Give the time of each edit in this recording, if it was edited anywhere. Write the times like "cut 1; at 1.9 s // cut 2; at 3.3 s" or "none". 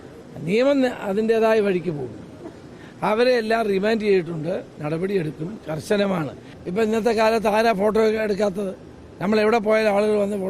cut 1; at 6.5 s